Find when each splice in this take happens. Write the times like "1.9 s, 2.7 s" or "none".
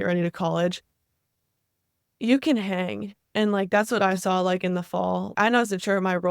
1.0 s, 5.3 s